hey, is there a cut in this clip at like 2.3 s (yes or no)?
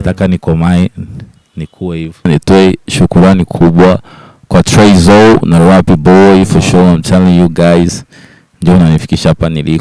yes